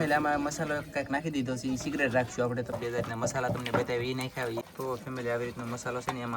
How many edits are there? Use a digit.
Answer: 2